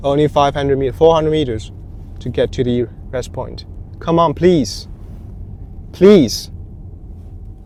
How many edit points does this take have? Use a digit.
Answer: 0